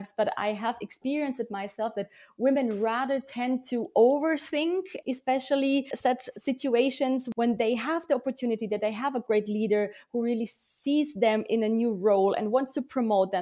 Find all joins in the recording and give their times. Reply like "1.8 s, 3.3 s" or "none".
4.9 s, 5.9 s, 7.2 s